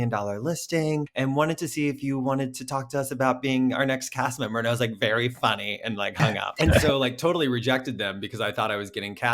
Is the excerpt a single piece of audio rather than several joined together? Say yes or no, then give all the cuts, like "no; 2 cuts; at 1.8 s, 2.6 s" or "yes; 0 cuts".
no; 2 cuts; at 1.1 s, 6.5 s